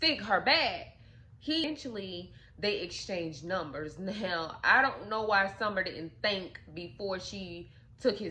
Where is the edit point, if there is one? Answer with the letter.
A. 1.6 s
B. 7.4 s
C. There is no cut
A